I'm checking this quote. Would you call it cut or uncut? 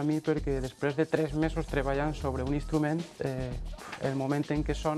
uncut